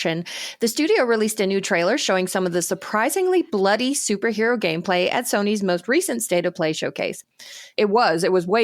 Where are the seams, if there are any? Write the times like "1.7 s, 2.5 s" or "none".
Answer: 7.6 s